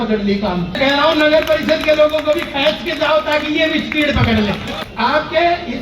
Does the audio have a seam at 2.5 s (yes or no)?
no